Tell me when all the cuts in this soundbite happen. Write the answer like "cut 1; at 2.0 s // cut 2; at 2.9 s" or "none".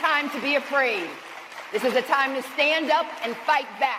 none